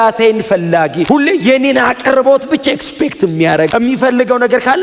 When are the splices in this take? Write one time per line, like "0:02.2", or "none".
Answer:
0:01.0
0:03.7